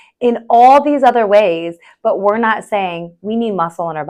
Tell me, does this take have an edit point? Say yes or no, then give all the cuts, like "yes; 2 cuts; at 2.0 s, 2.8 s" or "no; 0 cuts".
no; 0 cuts